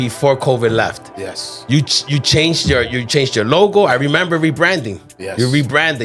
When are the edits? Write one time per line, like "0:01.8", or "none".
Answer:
none

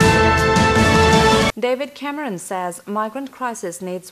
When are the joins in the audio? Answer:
0:01.4

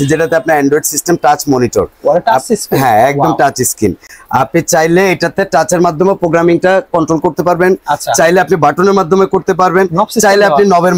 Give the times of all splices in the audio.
none

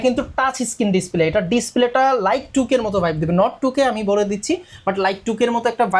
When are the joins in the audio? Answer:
none

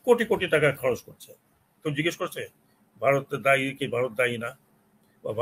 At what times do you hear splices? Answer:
0:01.7

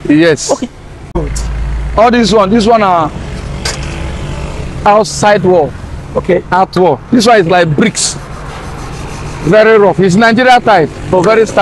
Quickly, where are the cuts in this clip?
0:01.2

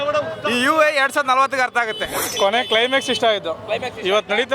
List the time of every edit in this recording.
0:02.3

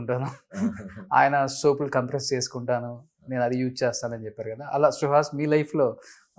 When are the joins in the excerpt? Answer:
none

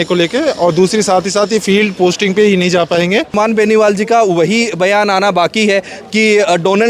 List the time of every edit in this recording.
0:03.3

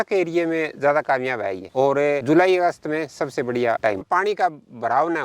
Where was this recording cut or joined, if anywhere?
0:04.0

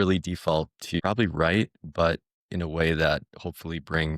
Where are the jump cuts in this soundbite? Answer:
0:01.0
0:02.4

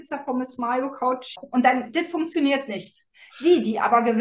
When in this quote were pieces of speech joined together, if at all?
0:01.4

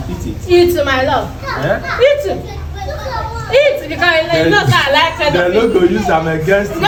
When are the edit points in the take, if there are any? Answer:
none

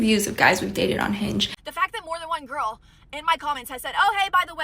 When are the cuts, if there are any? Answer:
0:01.6

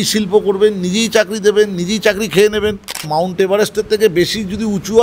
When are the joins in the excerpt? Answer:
0:03.1

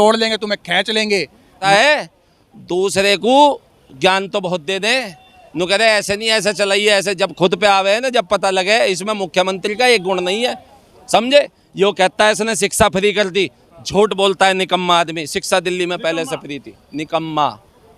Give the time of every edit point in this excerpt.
0:01.6

